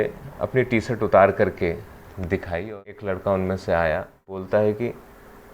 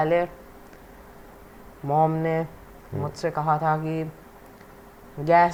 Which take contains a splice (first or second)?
first